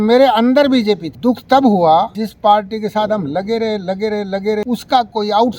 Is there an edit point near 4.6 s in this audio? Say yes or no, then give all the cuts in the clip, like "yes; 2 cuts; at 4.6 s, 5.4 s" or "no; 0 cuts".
yes; 3 cuts; at 1.1 s, 2.2 s, 4.6 s